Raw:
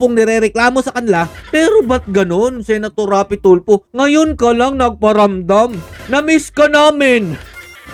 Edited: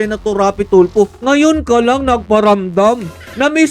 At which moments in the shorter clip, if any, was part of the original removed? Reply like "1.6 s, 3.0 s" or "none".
none